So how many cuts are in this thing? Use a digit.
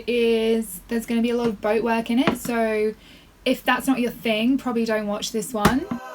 0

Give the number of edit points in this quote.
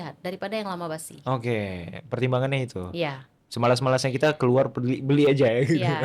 0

